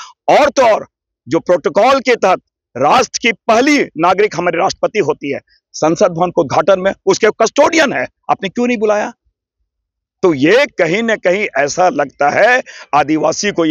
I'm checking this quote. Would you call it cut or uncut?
uncut